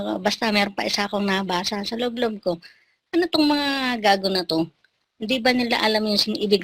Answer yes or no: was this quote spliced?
no